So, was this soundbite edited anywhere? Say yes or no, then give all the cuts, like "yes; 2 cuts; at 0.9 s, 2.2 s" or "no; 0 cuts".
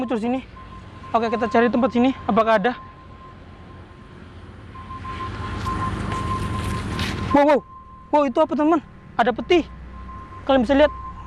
no; 0 cuts